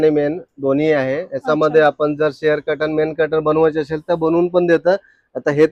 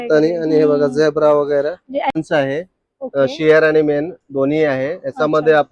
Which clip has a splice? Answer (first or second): second